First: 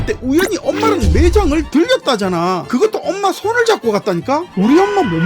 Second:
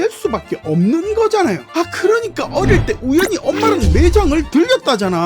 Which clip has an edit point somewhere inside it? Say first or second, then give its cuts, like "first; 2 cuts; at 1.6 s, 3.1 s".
second; 1 cut; at 1.6 s